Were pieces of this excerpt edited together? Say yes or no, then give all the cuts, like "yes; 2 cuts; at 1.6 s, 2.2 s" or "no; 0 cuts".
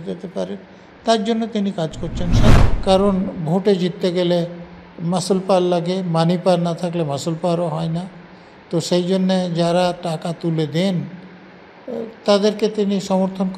yes; 1 cut; at 2.5 s